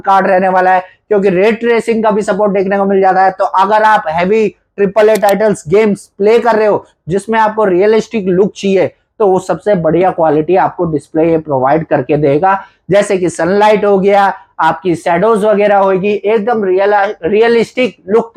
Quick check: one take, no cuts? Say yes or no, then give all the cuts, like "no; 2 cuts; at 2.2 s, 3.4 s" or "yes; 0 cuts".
yes; 0 cuts